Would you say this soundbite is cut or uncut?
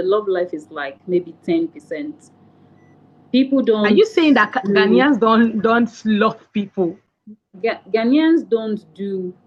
uncut